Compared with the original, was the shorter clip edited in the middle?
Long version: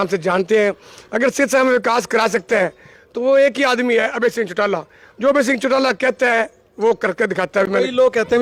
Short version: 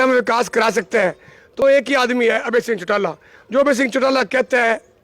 yes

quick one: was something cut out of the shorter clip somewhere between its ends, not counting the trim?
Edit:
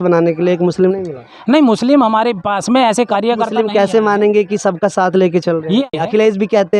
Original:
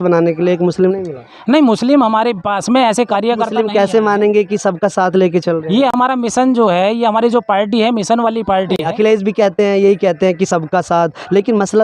yes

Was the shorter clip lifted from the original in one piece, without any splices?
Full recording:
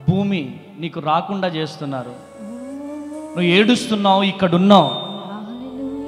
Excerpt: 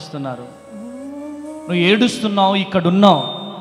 yes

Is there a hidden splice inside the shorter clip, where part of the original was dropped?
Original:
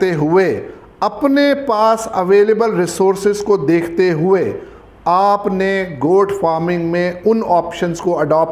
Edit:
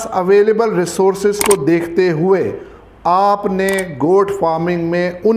no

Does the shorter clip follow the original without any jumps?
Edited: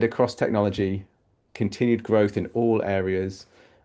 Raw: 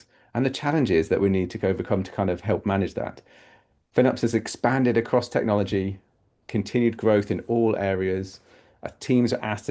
yes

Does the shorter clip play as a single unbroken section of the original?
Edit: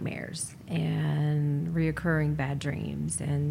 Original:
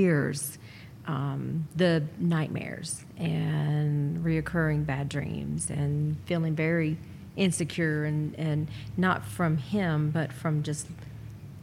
yes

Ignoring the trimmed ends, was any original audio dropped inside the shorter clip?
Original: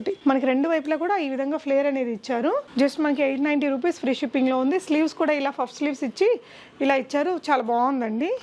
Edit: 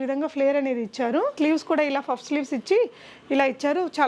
yes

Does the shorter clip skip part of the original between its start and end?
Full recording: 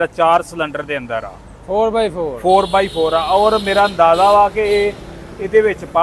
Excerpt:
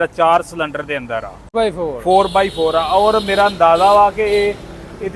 yes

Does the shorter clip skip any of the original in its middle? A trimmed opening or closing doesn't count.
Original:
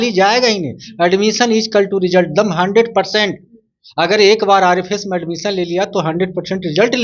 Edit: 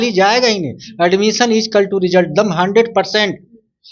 no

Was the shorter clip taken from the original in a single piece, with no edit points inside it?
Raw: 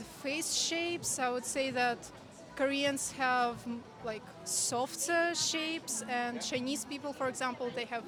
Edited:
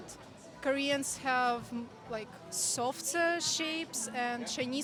yes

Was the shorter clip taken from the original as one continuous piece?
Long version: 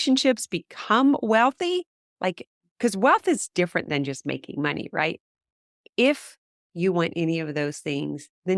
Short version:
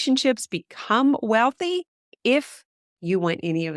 no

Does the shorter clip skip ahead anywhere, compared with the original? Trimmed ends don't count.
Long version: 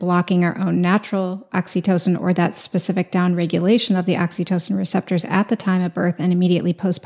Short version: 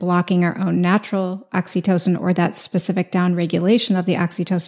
no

